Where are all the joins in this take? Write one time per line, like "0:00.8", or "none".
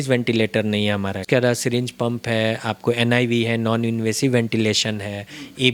0:01.3